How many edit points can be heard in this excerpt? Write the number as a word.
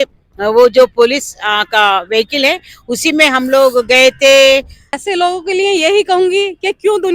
one